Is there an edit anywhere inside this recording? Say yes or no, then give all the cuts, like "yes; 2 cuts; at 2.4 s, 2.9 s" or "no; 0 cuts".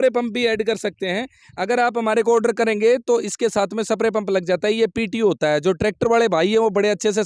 no; 0 cuts